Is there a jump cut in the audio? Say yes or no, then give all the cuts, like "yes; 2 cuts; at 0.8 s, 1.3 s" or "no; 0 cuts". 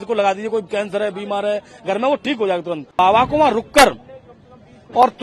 yes; 1 cut; at 3.0 s